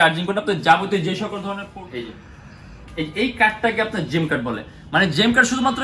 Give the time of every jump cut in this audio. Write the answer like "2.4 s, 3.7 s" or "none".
1.6 s